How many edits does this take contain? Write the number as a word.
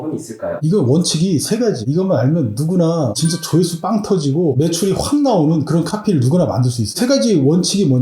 one